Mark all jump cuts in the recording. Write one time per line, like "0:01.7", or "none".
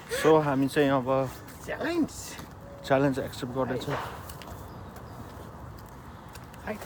none

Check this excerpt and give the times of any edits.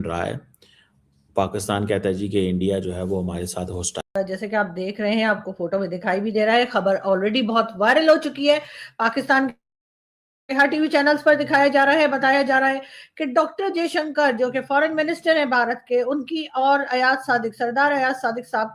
0:04.0

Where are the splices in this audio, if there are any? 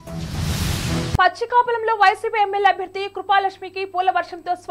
0:01.2

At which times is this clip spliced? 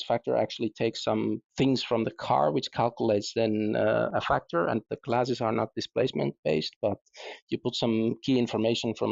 0:04.9

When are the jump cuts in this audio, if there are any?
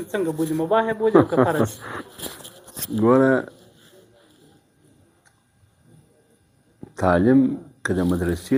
none

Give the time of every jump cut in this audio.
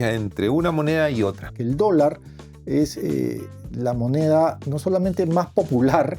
0:01.5

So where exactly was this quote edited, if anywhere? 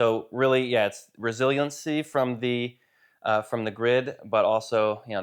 none

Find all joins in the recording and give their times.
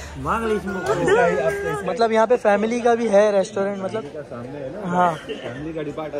0:01.7

